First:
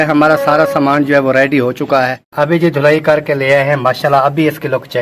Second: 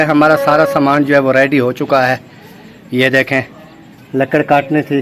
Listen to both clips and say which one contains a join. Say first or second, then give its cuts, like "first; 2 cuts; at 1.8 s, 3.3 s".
first; 1 cut; at 2.2 s